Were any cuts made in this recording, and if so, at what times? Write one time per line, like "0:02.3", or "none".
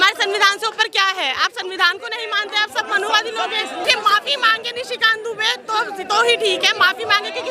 0:03.8